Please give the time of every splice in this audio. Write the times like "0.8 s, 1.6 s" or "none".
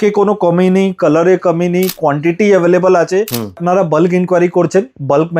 3.6 s